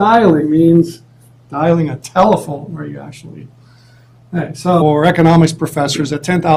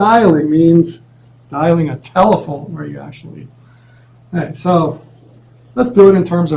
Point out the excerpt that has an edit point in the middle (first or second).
second